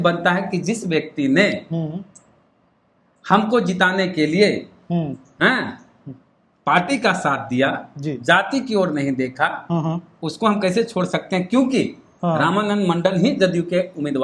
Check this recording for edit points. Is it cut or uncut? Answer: uncut